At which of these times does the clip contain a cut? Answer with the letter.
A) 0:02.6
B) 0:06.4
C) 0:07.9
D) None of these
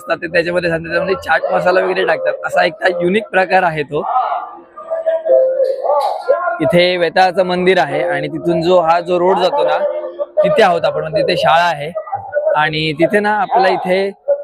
B